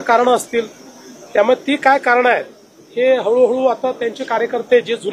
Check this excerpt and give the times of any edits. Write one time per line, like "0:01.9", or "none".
none